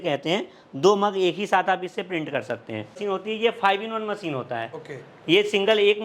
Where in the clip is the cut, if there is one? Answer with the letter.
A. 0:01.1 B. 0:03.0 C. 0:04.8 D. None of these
B